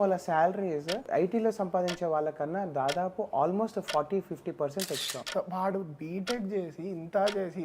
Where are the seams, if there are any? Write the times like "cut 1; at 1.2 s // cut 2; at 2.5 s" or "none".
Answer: cut 1; at 1.0 s // cut 2; at 5.2 s